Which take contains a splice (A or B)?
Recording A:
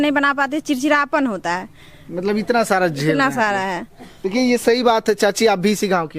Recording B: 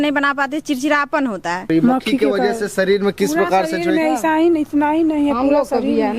B